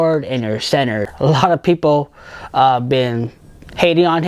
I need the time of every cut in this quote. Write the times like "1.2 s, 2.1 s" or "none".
1.1 s